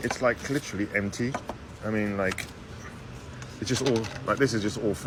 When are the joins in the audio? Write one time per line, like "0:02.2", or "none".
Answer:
none